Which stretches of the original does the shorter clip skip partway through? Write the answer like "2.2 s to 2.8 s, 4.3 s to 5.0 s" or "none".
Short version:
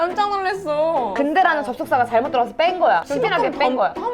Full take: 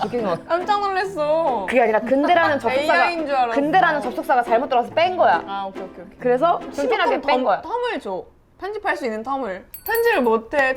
1.6 s to 3.5 s, 5.4 s to 6.7 s